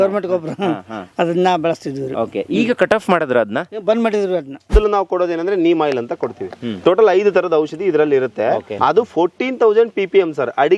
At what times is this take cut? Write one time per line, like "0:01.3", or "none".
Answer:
0:04.7
0:08.7

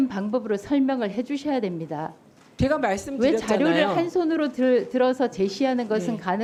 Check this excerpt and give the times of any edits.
none

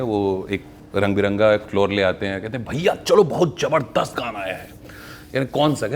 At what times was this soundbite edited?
none

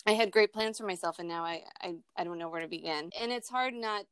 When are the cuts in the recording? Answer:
0:03.1

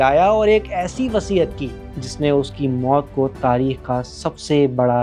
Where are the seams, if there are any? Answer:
none

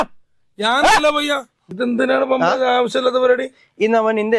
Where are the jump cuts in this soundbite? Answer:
0:01.7

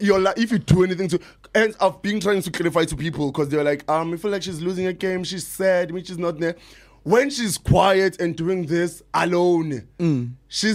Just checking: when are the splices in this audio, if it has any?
none

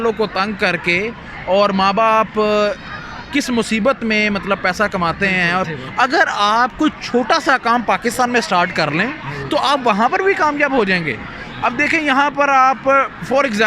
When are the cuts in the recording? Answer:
0:05.7

